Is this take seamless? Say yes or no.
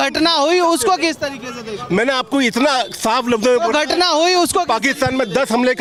yes